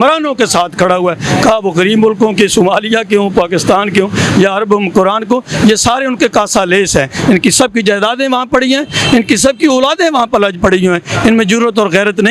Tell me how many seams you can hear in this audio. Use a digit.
0